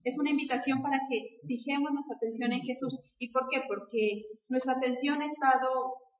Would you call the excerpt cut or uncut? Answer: cut